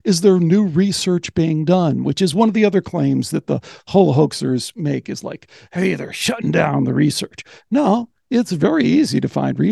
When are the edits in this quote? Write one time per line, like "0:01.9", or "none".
none